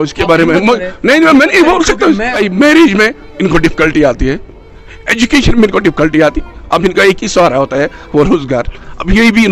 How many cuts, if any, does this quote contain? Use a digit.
1